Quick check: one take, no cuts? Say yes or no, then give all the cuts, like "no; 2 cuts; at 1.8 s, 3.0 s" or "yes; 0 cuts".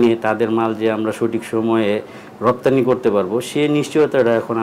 yes; 0 cuts